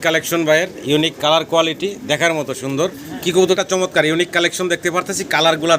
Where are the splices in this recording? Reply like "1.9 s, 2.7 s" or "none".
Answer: 3.6 s